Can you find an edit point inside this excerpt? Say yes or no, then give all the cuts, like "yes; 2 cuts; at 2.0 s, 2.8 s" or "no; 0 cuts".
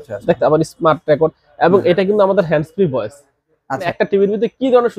yes; 1 cut; at 3.9 s